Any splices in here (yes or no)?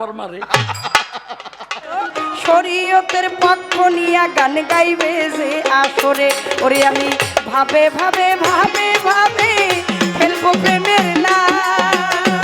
yes